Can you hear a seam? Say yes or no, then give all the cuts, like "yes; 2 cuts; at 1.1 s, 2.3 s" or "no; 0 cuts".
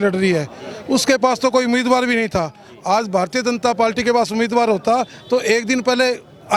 no; 0 cuts